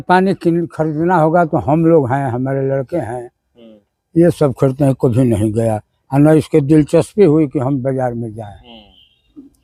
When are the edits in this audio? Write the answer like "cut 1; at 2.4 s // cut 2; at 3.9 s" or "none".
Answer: none